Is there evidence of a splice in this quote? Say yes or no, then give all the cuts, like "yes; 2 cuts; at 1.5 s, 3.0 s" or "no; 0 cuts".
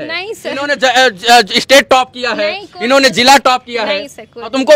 no; 0 cuts